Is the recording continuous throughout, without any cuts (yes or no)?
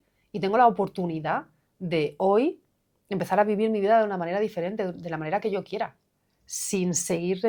yes